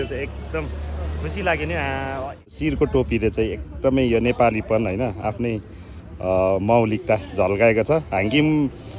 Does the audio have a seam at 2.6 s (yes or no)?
yes